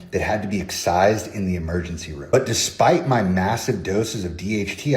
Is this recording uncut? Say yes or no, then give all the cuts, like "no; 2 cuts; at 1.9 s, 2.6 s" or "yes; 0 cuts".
no; 1 cut; at 2.2 s